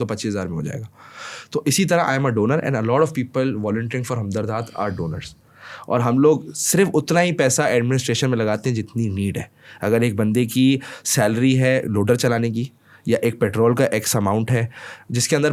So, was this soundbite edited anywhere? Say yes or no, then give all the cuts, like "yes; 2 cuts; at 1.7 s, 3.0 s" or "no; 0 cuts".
no; 0 cuts